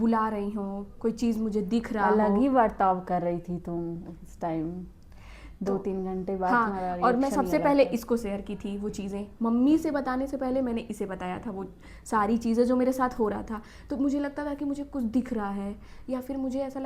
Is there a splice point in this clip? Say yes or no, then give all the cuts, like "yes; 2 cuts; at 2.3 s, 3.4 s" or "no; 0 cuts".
no; 0 cuts